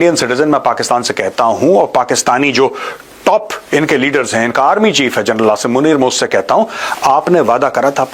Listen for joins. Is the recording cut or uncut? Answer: uncut